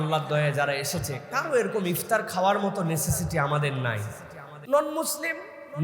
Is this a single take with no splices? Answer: no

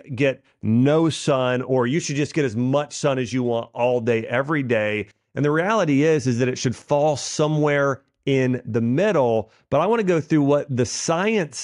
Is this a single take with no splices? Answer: yes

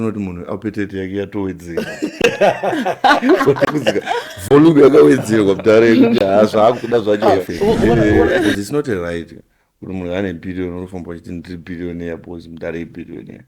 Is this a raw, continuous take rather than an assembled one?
no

